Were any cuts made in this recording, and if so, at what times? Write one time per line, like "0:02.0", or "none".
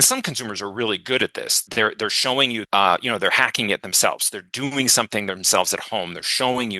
0:01.6
0:02.6